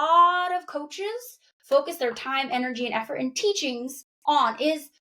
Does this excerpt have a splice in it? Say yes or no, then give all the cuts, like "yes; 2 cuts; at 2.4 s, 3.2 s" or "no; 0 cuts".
no; 0 cuts